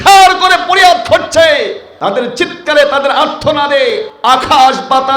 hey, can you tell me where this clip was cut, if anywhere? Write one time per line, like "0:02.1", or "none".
0:01.9
0:04.1